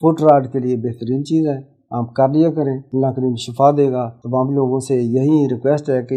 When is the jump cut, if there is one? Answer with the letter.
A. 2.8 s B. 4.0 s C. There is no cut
A